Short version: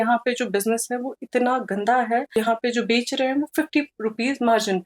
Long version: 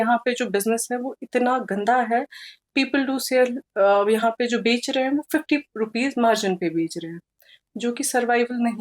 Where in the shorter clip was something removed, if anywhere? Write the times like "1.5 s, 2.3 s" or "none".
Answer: 2.4 s